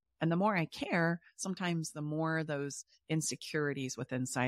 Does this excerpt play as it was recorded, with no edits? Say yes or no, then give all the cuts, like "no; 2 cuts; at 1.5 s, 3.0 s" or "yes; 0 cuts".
yes; 0 cuts